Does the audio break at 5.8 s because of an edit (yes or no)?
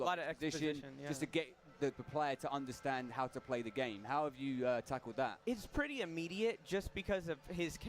yes